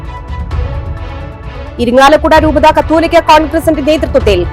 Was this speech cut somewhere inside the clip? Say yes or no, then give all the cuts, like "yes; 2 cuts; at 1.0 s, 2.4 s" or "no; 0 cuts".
yes; 1 cut; at 1.7 s